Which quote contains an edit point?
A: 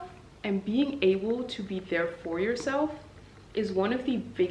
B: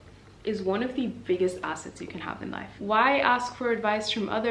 B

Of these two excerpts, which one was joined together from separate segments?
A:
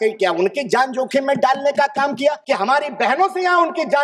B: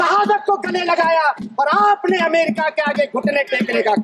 A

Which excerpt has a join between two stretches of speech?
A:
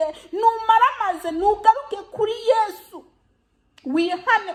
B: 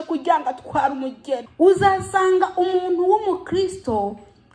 B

